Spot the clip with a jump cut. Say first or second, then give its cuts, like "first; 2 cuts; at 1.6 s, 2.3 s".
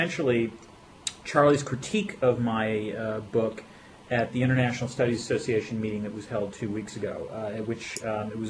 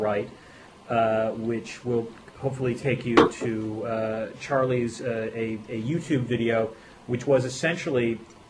second; 1 cut; at 4.8 s